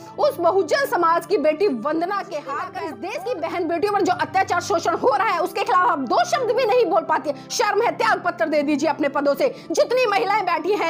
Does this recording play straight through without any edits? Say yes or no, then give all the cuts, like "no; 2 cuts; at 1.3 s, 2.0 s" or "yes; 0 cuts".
no; 1 cut; at 2.6 s